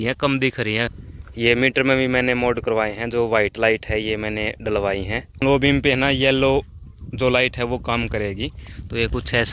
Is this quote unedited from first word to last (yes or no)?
no